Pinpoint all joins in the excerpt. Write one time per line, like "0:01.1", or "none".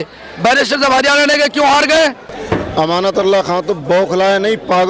0:02.7